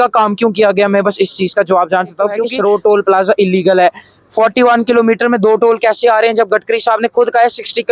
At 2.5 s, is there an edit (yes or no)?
yes